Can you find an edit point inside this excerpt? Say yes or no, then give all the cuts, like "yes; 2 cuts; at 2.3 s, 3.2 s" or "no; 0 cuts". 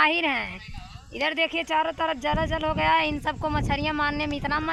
no; 0 cuts